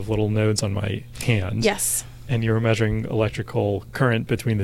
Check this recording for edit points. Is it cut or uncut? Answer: uncut